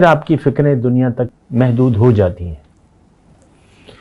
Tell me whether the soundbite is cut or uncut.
cut